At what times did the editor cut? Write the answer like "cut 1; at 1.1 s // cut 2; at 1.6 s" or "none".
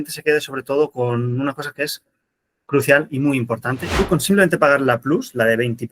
cut 1; at 3.9 s